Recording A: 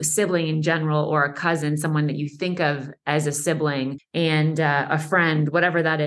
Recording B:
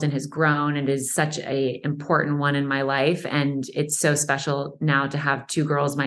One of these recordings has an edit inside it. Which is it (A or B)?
A